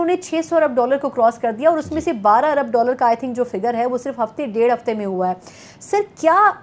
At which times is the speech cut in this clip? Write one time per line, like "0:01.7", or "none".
none